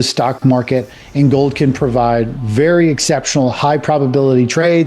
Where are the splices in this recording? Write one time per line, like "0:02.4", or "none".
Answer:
none